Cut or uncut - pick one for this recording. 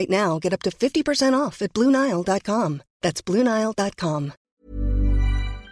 cut